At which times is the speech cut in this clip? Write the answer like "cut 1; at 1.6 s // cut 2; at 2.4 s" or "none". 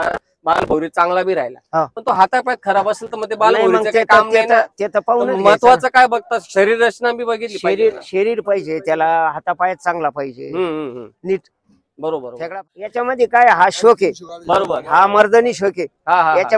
cut 1; at 12.4 s